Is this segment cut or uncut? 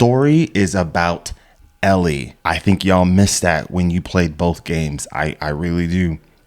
cut